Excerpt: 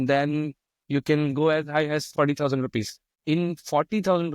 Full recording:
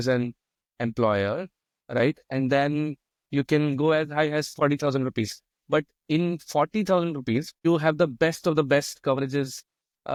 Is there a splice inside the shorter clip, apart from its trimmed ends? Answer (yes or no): yes